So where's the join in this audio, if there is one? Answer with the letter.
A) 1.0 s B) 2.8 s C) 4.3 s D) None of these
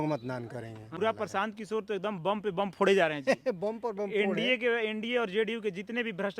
A